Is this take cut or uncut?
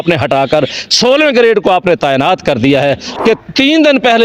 cut